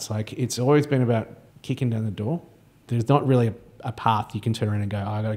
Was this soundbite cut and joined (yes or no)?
yes